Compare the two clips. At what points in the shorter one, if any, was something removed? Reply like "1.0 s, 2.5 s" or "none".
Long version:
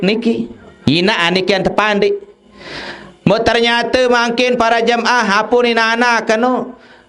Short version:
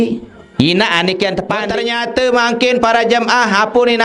1.7 s